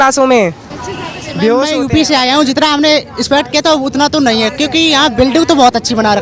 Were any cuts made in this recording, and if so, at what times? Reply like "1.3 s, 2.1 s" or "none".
1.7 s